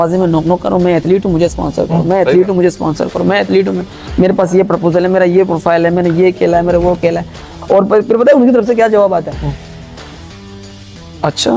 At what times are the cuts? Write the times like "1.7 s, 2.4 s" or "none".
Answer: none